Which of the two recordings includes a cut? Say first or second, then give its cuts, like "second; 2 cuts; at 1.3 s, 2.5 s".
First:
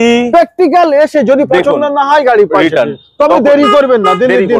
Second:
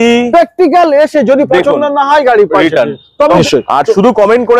second; 1 cut; at 3.4 s